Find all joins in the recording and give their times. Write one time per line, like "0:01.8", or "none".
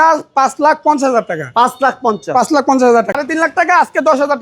0:03.1